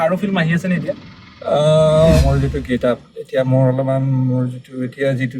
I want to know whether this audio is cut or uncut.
cut